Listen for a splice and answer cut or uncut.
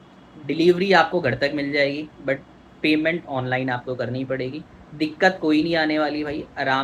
uncut